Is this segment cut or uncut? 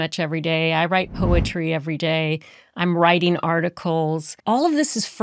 cut